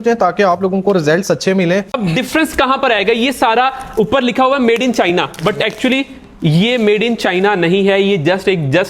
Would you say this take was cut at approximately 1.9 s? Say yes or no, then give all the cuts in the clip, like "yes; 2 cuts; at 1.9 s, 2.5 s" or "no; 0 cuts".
yes; 1 cut; at 1.9 s